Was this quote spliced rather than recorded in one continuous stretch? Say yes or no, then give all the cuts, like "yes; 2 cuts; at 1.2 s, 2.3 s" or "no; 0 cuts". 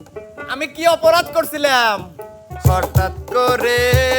yes; 1 cut; at 2.5 s